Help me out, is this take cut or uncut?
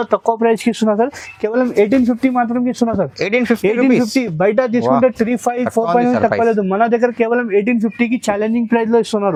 uncut